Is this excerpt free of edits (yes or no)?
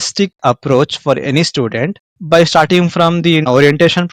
yes